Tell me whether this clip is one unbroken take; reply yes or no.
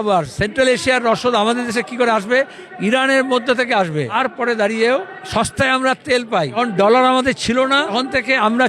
no